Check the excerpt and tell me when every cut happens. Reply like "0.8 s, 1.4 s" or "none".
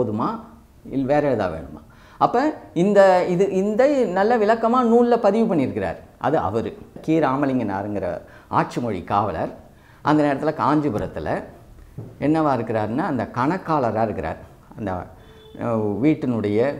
7.0 s